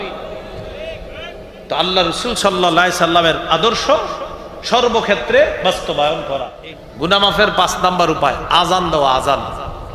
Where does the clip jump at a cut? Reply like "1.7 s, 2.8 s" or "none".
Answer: 6.6 s